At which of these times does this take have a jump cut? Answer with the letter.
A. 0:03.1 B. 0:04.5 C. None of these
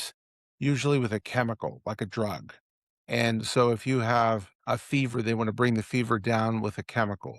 B